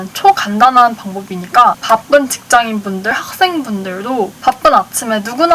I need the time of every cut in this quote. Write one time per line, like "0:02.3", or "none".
none